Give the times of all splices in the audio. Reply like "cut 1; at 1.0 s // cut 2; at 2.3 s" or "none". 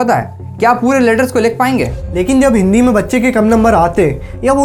none